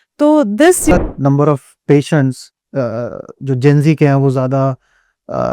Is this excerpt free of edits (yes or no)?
no